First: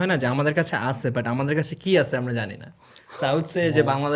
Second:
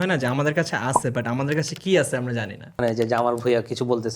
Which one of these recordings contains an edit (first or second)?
second